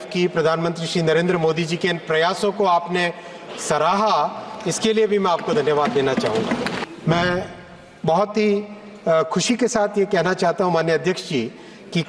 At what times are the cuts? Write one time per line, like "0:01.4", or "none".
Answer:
0:06.8